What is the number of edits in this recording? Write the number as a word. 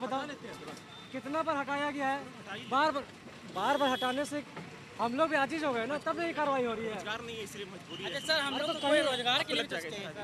zero